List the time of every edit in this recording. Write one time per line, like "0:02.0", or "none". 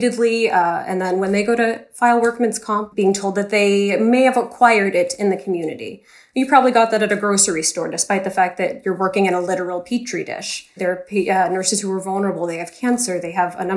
0:02.9
0:10.6